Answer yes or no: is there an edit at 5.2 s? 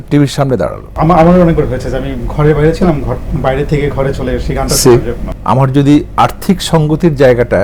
yes